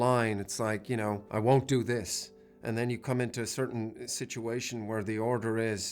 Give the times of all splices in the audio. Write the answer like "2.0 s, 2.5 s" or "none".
1.2 s